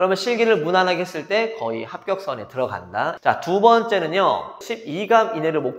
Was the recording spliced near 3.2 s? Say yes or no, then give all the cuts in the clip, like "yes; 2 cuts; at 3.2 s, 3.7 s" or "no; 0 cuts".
yes; 2 cuts; at 3.2 s, 4.5 s